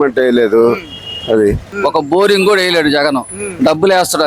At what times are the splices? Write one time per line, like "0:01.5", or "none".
0:01.7